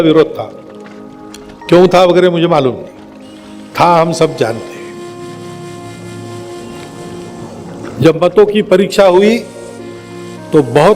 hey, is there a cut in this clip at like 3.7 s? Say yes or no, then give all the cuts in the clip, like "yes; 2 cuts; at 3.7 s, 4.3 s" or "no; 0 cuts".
no; 2 cuts; at 5.2 s, 7.8 s